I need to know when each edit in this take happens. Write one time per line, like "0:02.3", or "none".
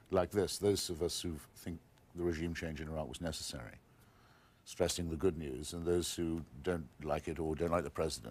0:01.2